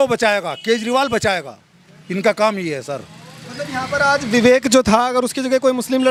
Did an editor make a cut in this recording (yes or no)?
no